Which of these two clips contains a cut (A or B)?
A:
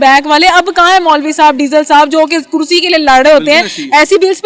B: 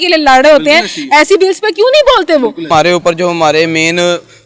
B